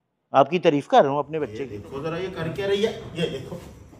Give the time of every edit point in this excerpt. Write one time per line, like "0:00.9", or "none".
0:01.4